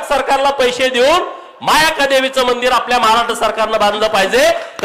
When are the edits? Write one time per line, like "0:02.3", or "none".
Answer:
none

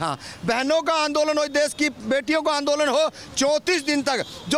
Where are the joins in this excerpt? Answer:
none

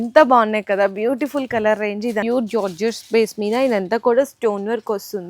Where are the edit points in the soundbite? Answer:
0:02.2

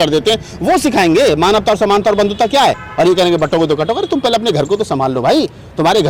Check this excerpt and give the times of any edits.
0:02.8

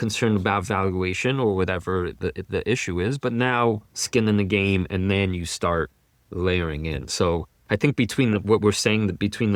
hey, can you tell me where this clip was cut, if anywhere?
none

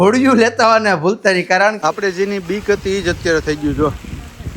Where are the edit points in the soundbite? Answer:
0:01.8

